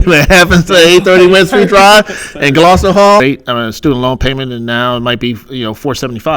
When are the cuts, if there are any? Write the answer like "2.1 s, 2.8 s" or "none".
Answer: 3.2 s